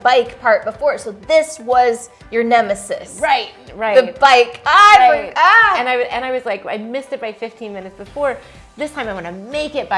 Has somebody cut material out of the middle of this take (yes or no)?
no